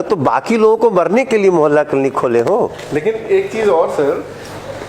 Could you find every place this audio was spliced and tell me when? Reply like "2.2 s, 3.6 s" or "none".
none